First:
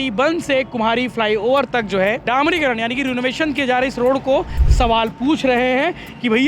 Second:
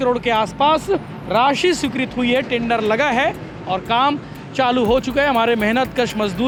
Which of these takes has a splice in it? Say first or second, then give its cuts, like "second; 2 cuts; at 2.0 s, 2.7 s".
first; 1 cut; at 4.6 s